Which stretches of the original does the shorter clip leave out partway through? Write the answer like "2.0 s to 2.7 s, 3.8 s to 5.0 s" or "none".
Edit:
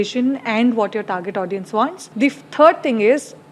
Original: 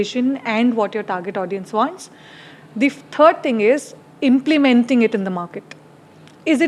2.0 s to 2.6 s